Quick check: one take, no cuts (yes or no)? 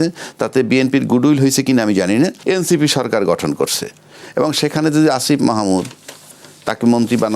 no